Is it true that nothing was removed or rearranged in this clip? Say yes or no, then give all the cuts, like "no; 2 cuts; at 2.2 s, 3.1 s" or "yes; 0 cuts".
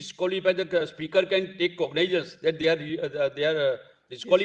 yes; 0 cuts